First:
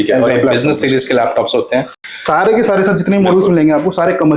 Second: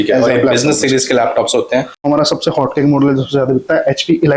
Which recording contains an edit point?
second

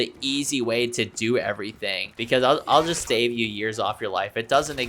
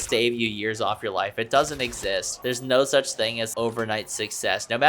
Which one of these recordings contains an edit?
first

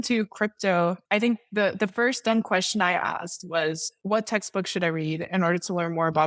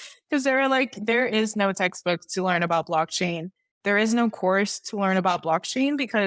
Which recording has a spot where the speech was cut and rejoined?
first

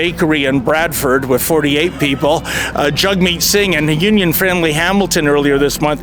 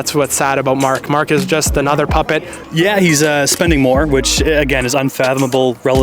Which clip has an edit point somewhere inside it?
second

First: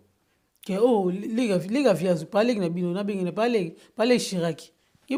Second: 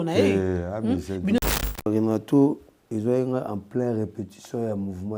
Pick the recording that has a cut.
second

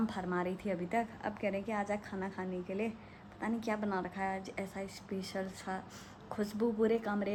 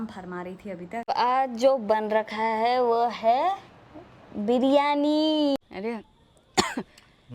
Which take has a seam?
second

